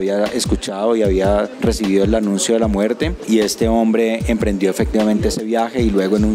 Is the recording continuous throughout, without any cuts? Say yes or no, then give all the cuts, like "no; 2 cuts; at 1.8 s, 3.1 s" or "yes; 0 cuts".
no; 2 cuts; at 1.5 s, 3.1 s